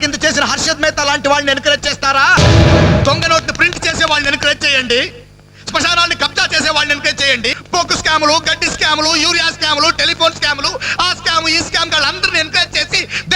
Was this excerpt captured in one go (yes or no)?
no